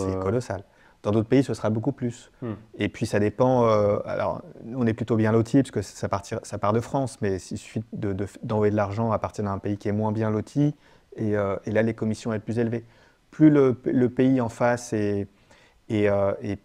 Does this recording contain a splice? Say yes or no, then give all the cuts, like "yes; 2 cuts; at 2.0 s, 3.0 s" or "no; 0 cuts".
no; 0 cuts